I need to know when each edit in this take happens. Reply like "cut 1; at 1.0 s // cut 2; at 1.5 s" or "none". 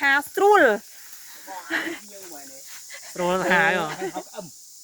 none